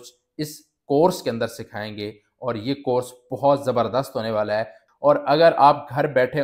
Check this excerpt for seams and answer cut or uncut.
cut